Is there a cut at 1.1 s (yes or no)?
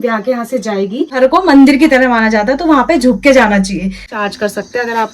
yes